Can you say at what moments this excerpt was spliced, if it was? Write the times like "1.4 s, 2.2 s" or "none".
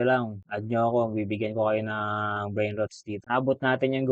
3.1 s